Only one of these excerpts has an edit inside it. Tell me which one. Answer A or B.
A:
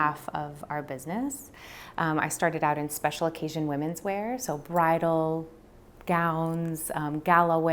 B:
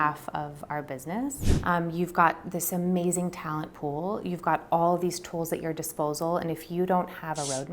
B